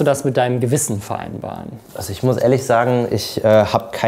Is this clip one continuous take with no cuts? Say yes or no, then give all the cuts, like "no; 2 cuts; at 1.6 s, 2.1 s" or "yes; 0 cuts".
yes; 0 cuts